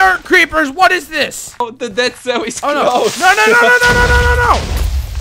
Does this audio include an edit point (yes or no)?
yes